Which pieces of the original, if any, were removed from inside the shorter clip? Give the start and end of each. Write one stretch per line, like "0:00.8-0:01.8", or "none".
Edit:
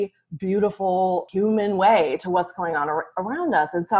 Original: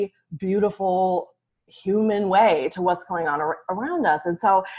0:01.3-0:01.8